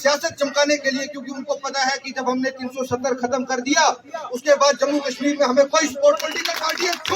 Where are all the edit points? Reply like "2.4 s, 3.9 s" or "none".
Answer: 6.2 s